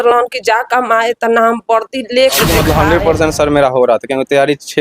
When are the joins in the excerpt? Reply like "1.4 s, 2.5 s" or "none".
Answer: 2.5 s